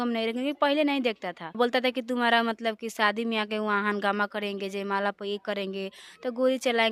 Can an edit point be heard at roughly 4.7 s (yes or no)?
no